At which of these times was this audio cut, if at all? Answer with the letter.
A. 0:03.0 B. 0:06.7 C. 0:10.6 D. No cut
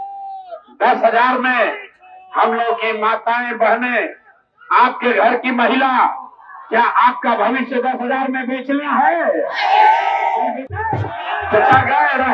C